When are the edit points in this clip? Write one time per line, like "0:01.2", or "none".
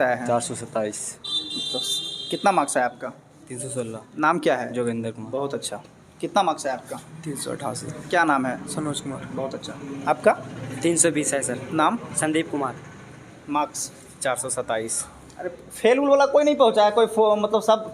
none